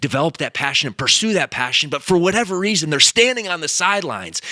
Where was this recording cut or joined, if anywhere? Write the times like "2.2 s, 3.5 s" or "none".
none